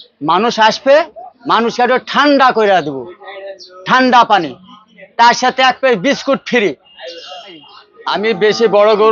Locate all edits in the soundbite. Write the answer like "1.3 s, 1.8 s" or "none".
8.2 s